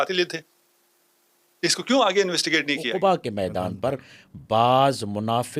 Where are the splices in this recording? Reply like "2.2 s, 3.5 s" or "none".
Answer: 2.9 s